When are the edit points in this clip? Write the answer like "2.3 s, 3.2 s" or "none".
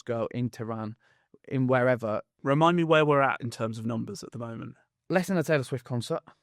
2.3 s